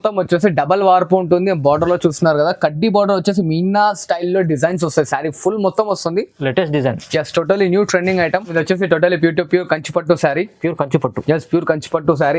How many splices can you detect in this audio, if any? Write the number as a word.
one